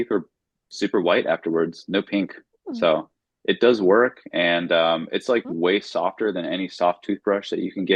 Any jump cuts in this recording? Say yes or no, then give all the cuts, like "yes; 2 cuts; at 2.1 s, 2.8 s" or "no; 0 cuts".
no; 0 cuts